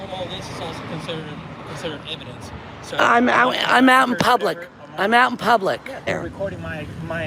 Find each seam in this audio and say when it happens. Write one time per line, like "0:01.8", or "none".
0:06.1

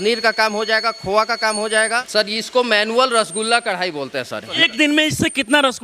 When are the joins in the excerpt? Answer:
0:02.1
0:04.5

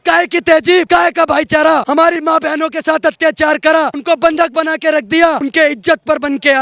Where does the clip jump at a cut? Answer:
0:00.9
0:01.8
0:04.0
0:05.4

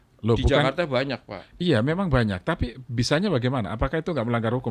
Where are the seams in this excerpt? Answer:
none

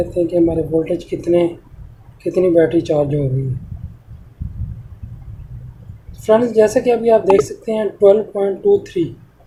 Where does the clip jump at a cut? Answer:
none

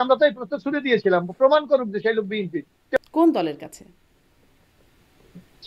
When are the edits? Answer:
0:03.0

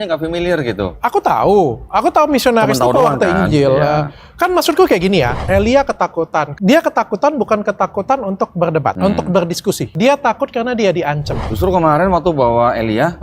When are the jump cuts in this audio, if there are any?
0:05.4
0:06.5
0:09.0
0:09.9
0:11.4

